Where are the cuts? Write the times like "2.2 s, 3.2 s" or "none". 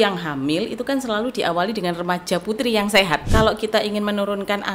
3.3 s